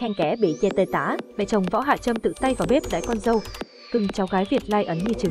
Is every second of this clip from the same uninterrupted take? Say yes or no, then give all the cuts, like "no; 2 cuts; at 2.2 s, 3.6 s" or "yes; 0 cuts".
no; 1 cut; at 1.4 s